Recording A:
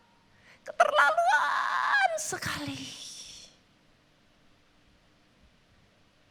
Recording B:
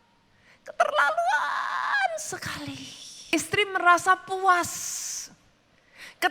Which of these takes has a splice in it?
B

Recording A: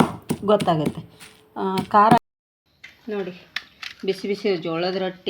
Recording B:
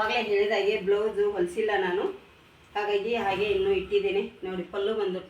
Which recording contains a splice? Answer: A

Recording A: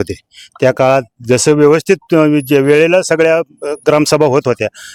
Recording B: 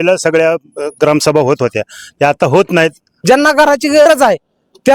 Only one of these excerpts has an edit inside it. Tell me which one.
B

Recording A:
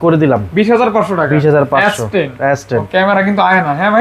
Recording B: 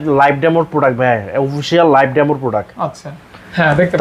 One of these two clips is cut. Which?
A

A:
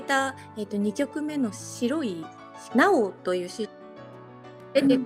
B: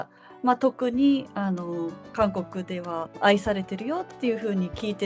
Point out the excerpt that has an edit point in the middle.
B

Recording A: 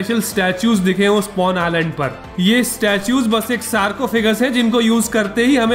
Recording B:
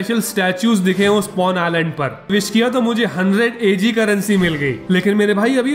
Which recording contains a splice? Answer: B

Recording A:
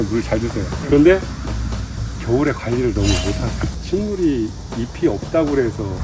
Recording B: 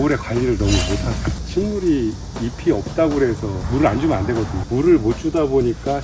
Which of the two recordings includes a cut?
B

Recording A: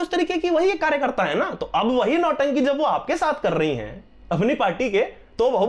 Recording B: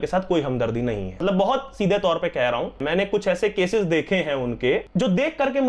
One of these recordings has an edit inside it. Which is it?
B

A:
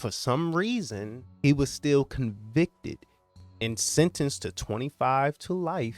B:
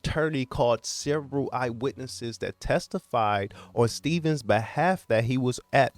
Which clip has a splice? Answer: A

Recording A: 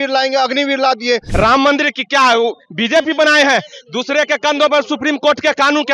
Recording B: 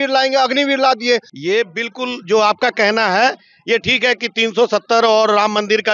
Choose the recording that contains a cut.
A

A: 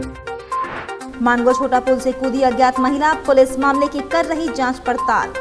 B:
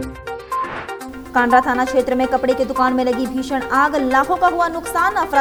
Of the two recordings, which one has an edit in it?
A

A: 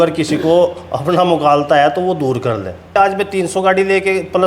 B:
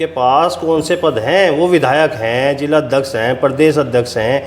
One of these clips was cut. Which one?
A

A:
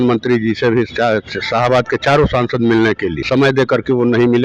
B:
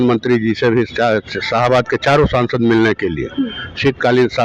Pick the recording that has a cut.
A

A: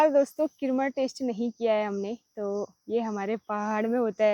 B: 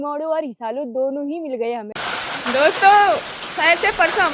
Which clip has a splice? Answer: B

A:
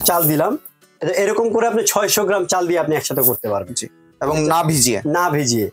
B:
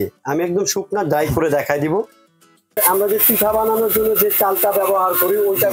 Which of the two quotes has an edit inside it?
B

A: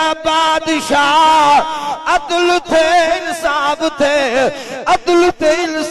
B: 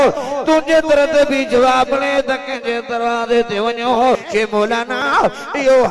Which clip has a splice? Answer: B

